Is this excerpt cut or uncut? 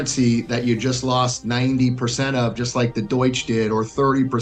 uncut